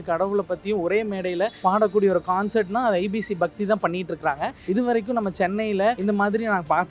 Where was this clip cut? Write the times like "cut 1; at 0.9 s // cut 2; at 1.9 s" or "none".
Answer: cut 1; at 1.5 s // cut 2; at 4.6 s // cut 3; at 6.0 s